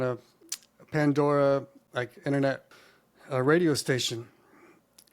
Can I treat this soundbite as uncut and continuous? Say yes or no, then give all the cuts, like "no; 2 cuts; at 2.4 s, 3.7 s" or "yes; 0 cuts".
no; 1 cut; at 2.8 s